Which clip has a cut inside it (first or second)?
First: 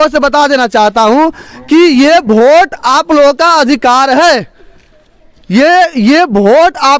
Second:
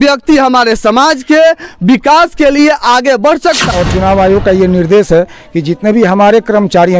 second